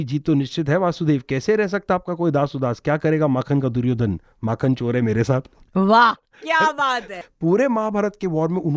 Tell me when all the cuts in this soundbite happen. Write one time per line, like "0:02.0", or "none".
0:07.2

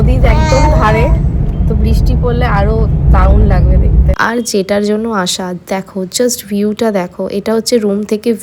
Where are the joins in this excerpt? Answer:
0:04.1

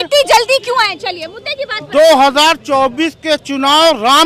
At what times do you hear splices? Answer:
none

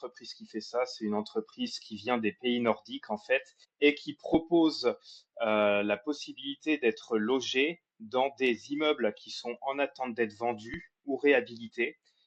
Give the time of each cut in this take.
0:03.6

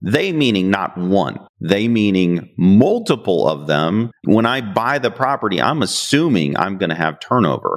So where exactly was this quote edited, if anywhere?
0:04.2

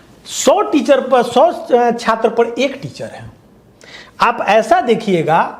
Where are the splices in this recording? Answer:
none

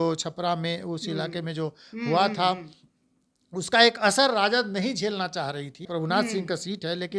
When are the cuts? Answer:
0:05.9

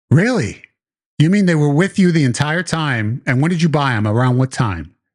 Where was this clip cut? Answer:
none

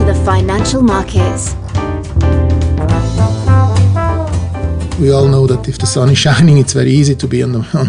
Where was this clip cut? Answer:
0:04.9

